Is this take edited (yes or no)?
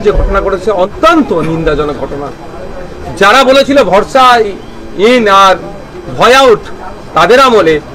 yes